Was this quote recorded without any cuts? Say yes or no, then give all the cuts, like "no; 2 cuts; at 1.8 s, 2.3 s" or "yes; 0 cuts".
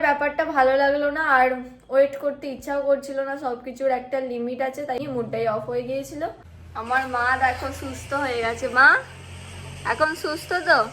no; 2 cuts; at 5.0 s, 6.5 s